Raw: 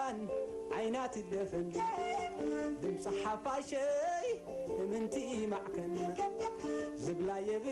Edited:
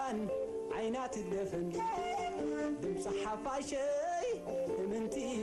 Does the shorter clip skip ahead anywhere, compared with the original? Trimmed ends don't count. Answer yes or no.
no